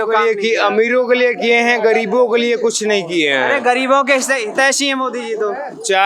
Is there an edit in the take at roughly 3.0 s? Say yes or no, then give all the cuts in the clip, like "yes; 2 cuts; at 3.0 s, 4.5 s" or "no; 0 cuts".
no; 0 cuts